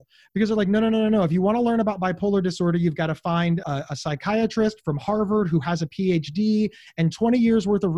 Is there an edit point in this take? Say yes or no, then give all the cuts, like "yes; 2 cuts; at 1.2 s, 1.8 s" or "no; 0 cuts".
no; 0 cuts